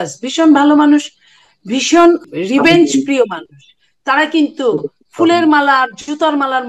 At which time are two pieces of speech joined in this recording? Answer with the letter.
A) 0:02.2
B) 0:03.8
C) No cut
A